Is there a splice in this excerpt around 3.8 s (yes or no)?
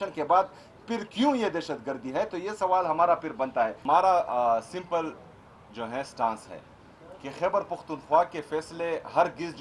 yes